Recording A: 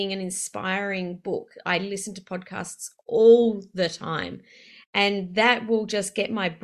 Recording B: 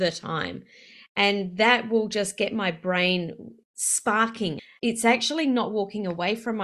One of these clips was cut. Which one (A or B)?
B